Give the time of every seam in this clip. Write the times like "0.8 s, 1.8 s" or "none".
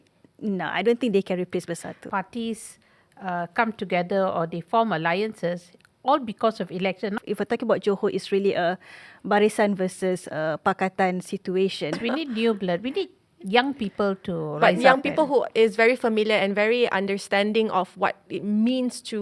2.0 s, 7.1 s, 12.0 s